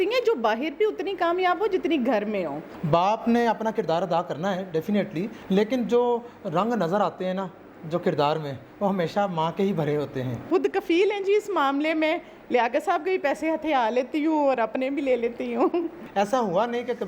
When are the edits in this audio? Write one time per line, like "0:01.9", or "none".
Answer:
0:02.7
0:05.3
0:10.4
0:15.9

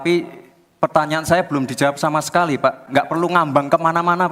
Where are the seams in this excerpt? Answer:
0:02.8

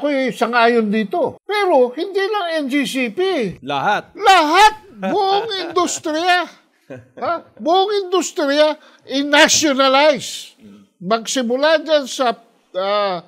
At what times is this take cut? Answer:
0:01.4

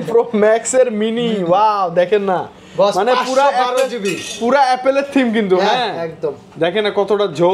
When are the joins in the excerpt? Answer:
none

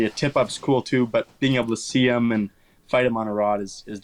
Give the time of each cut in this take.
none

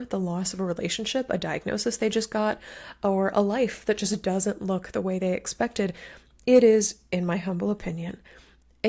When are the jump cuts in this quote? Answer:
none

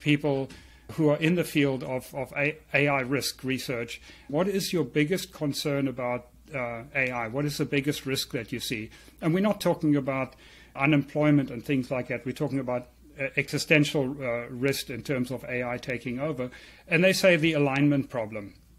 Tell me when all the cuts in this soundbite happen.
0:00.9
0:04.3
0:10.8

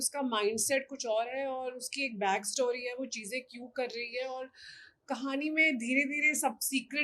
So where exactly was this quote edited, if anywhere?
none

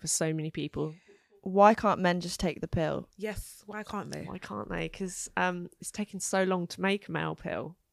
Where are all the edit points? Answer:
0:01.3
0:03.1

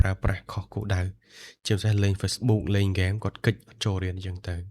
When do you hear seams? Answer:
0:02.4

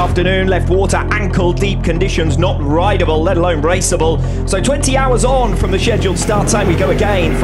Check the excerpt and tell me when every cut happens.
none

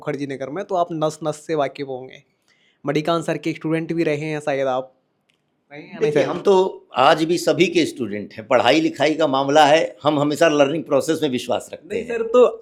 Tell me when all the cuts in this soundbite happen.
none

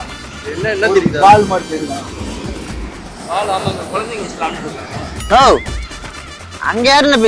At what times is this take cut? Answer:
none

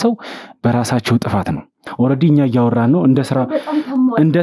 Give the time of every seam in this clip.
0:01.8

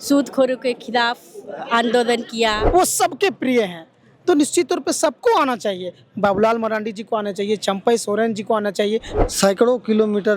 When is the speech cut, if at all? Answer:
0:02.6
0:09.1

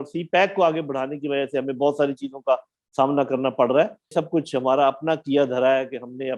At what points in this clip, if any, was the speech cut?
0:04.1

